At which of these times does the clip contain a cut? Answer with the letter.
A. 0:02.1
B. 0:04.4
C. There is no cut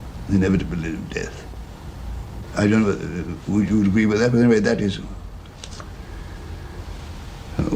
A